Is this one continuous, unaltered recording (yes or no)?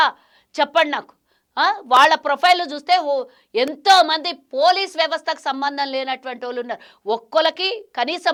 yes